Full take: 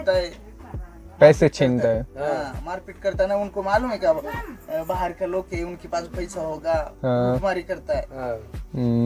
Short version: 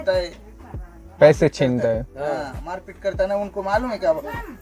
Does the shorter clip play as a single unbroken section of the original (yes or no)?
yes